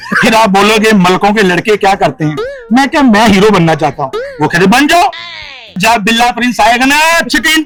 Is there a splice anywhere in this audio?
no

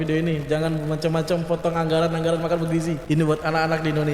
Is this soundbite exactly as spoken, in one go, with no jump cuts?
no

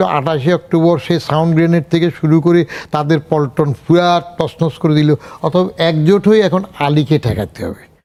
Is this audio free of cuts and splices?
yes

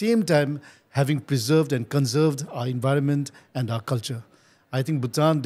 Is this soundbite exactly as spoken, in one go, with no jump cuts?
yes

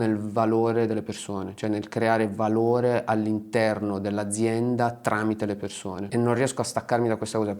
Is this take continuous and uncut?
no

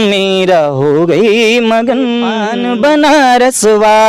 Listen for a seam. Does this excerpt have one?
yes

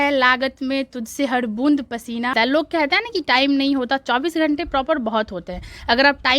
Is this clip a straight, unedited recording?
no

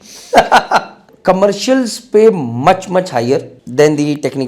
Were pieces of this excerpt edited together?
yes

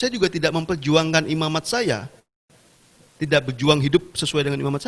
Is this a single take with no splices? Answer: yes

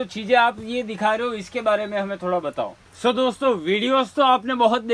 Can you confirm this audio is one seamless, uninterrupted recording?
no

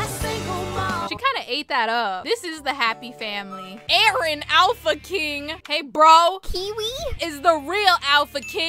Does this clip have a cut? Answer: yes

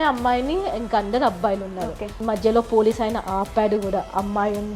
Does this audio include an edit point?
yes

